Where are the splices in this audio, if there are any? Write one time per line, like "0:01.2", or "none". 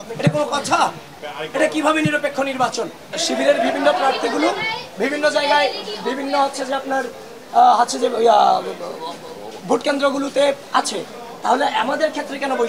0:03.2

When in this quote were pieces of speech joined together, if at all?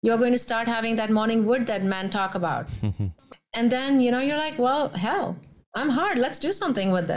0:03.1

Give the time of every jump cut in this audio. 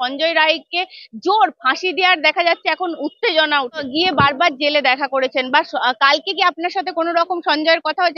0:03.9

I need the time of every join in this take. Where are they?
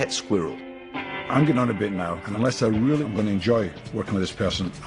0:01.0
0:02.2

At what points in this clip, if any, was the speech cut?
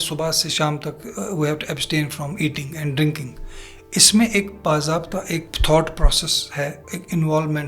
0:05.5

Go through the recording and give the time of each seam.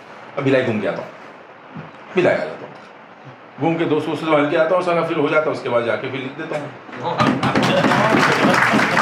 none

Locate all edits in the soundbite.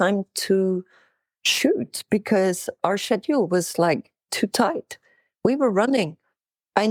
none

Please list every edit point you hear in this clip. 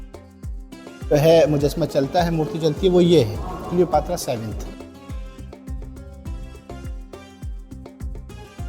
0:01.1
0:04.6

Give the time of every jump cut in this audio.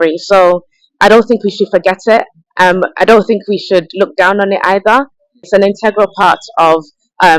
none

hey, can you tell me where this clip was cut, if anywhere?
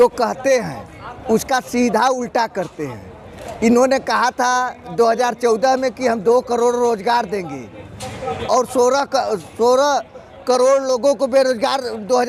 none

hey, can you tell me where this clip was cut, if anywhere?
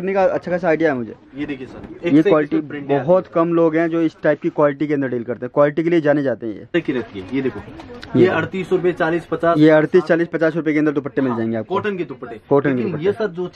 0:06.7

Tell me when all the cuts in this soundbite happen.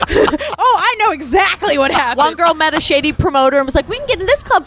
0:03.2

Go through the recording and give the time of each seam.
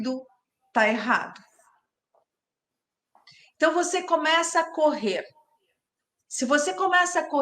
none

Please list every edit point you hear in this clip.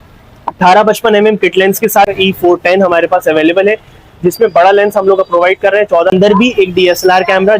0:02.1
0:06.1

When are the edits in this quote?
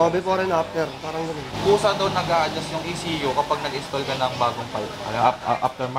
0:01.5

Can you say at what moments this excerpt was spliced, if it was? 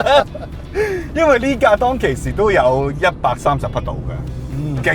none

